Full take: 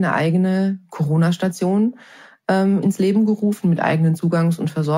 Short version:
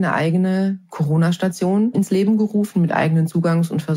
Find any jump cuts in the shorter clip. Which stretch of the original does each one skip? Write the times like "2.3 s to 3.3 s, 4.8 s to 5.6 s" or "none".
1.9 s to 2.8 s